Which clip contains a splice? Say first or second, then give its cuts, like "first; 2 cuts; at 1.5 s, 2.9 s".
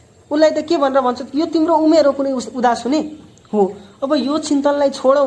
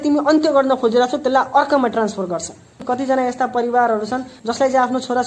second; 2 cuts; at 2.8 s, 4.3 s